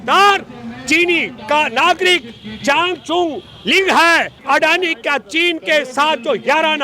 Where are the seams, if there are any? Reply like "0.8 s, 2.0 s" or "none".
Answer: 4.4 s